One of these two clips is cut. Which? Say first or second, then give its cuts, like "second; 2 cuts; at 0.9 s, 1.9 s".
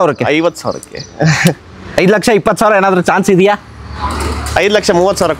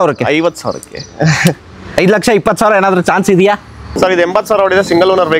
second; 1 cut; at 3.9 s